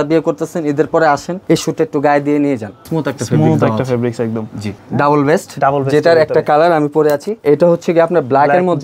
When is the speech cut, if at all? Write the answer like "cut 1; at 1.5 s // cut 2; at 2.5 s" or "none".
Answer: cut 1; at 1.3 s // cut 2; at 2.9 s // cut 3; at 4.8 s // cut 4; at 7.4 s